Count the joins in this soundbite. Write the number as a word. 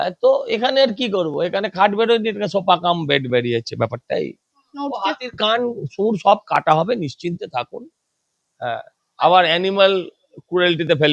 one